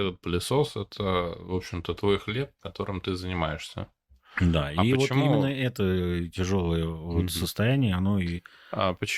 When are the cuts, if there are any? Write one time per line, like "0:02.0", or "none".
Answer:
none